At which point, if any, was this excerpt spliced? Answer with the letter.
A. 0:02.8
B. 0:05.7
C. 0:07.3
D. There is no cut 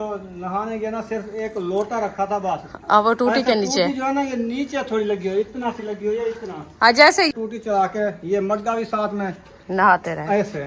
C